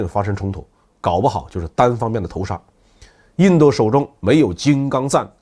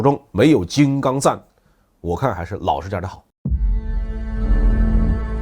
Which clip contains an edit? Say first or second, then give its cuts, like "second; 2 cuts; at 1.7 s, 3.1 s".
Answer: second; 1 cut; at 3.3 s